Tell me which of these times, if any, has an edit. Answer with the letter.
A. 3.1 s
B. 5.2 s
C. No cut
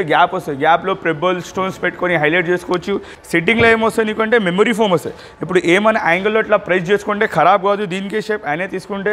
A